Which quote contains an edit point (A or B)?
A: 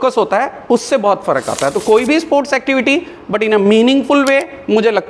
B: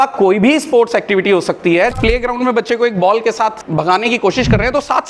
B